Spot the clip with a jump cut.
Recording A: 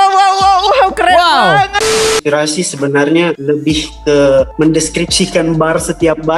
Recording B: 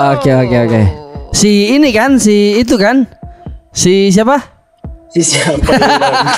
A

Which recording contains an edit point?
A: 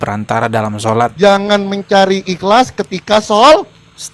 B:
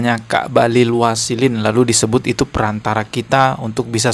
A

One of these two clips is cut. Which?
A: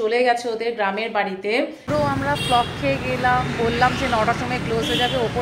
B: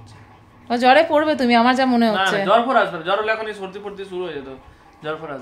A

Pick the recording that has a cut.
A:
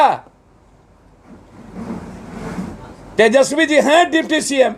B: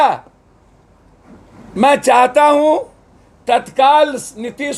B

